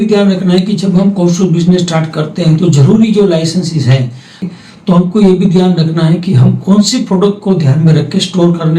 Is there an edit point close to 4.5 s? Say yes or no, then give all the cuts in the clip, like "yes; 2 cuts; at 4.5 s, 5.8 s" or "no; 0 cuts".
yes; 1 cut; at 4.5 s